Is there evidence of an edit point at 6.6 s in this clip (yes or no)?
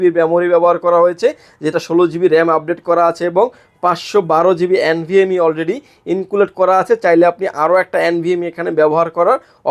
no